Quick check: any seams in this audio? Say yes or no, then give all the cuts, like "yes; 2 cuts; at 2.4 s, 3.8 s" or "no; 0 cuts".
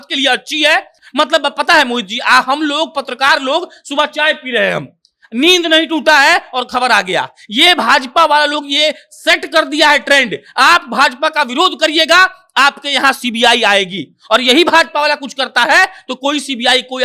no; 0 cuts